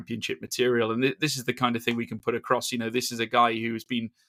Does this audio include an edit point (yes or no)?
no